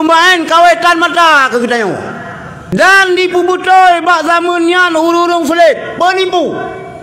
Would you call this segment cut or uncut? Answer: cut